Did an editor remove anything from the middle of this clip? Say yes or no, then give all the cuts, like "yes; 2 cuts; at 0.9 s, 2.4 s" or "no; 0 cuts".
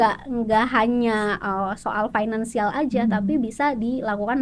no; 0 cuts